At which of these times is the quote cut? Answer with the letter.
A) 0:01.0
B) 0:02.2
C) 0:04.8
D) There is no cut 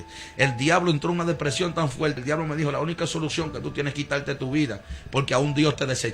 B